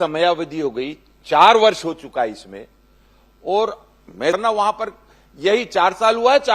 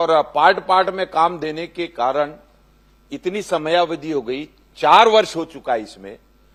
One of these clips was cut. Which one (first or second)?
first